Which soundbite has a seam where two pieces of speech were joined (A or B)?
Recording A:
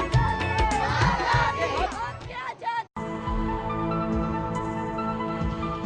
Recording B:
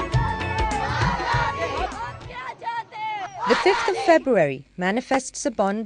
B